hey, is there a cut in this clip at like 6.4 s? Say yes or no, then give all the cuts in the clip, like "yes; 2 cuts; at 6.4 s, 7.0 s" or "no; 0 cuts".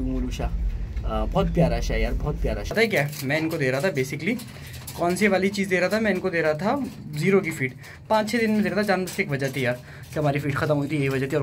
no; 1 cut; at 2.7 s